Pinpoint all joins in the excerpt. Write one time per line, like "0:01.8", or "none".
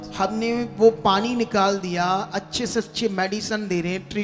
none